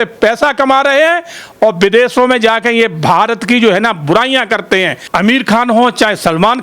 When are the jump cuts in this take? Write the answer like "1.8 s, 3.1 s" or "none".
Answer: 5.0 s